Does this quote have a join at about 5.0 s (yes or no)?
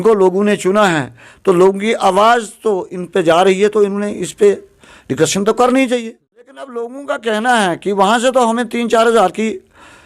no